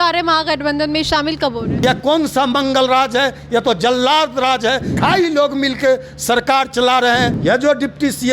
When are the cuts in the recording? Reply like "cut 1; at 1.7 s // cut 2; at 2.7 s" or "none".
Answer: cut 1; at 1.7 s // cut 2; at 4.9 s // cut 3; at 7.3 s